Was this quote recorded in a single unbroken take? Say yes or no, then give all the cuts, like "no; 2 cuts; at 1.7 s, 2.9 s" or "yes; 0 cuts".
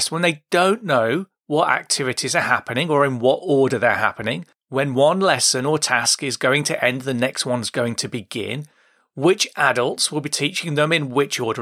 yes; 0 cuts